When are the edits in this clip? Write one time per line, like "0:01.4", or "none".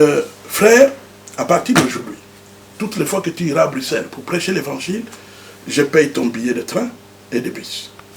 none